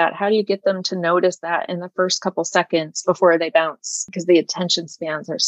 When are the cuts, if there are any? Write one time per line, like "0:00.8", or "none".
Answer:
0:04.0